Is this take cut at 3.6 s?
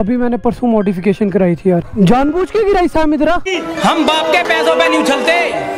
yes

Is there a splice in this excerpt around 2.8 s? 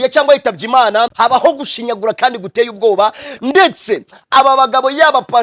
no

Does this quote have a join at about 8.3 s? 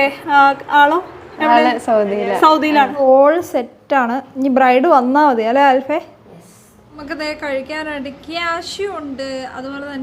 no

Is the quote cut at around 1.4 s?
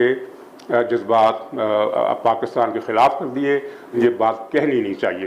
no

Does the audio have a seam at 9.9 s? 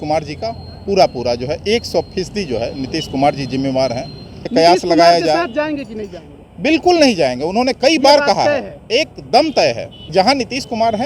yes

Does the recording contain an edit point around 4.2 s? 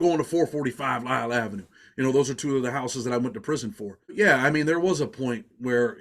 yes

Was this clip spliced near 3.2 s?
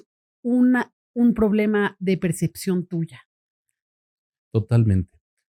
no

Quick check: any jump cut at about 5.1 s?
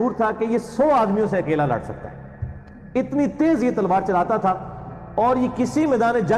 no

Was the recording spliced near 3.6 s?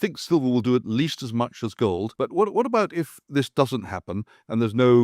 no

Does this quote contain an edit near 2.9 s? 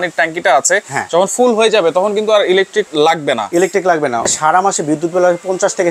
yes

